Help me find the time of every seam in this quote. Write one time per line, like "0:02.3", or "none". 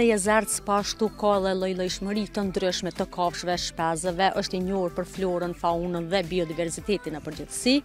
none